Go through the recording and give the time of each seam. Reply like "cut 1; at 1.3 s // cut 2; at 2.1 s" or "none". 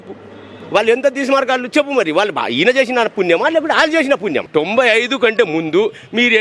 cut 1; at 4.4 s